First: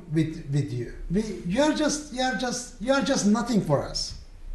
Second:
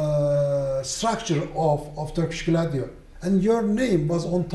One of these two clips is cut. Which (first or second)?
first